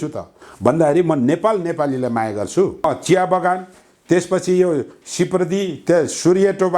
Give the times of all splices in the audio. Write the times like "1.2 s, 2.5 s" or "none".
2.8 s